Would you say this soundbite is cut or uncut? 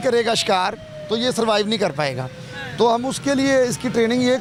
uncut